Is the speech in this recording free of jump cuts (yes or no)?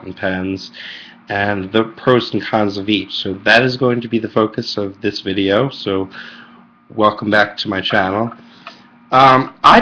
yes